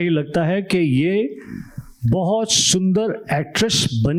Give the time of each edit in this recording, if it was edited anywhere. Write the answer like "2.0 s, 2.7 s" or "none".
none